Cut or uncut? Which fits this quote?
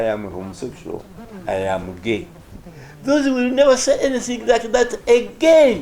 uncut